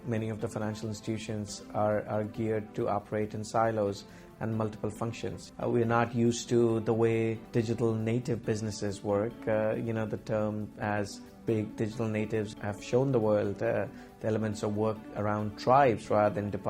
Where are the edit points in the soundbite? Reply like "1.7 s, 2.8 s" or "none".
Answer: 5.5 s, 7.4 s

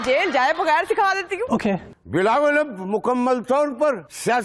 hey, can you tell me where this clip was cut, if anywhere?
1.9 s

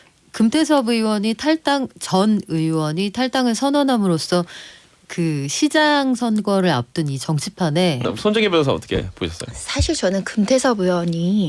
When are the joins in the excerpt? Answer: 8.0 s

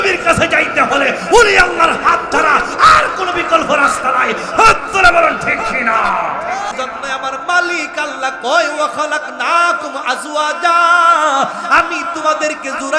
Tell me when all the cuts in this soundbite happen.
6.7 s

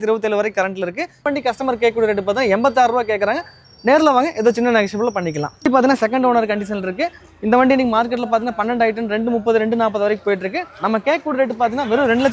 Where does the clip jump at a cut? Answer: 1.3 s, 5.7 s

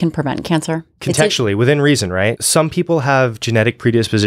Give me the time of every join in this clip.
0.9 s, 2.4 s

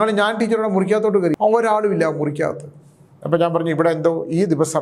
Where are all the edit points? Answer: 1.4 s

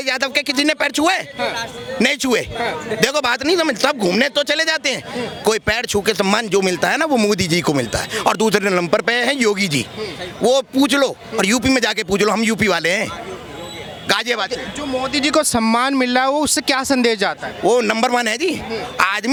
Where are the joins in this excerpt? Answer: none

